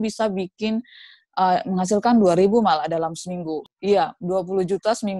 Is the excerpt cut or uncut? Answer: cut